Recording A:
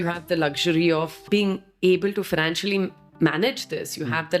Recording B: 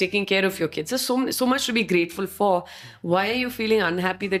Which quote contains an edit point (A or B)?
A